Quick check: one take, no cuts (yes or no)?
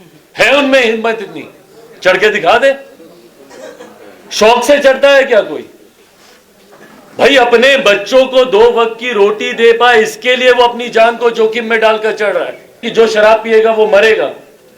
no